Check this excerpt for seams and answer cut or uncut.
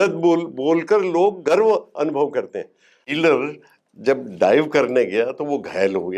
cut